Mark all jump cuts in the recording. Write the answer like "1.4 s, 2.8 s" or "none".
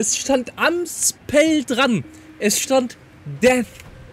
none

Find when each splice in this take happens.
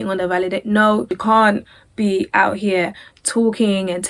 1.1 s

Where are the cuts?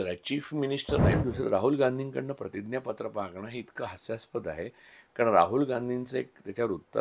1.1 s

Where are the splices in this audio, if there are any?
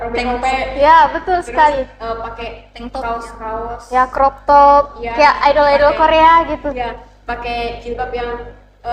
none

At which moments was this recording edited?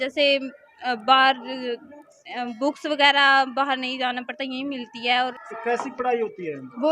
5.3 s

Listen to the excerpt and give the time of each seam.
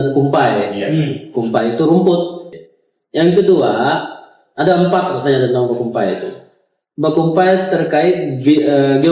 2.5 s

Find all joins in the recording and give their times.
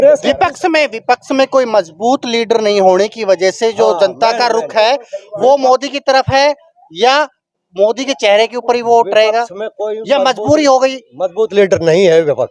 none

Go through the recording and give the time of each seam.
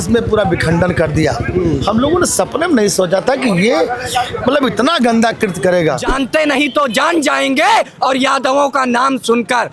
6.1 s

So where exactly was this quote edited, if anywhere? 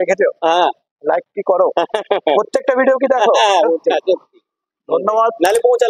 3.9 s

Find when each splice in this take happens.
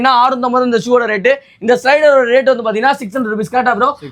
none

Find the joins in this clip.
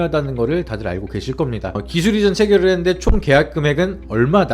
1.7 s

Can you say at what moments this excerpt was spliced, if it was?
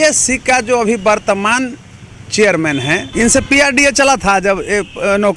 3.1 s

